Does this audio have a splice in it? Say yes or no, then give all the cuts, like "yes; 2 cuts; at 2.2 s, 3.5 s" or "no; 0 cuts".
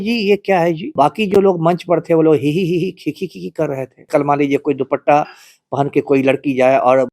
yes; 2 cuts; at 0.9 s, 4.1 s